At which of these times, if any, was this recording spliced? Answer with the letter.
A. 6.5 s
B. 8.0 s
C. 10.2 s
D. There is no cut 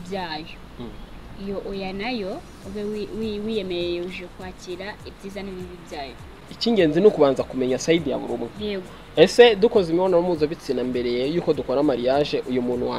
A